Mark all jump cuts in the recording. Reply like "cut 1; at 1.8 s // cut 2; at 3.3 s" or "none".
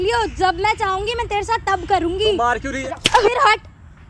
cut 1; at 2.7 s